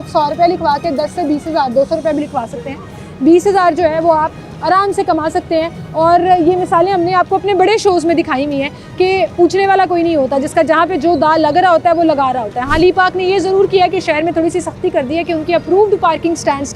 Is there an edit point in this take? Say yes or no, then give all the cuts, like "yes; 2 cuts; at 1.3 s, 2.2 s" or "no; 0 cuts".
no; 0 cuts